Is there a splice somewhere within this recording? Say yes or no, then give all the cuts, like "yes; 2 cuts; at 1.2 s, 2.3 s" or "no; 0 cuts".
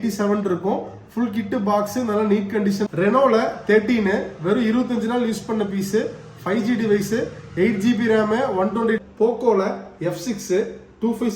yes; 2 cuts; at 2.8 s, 9.0 s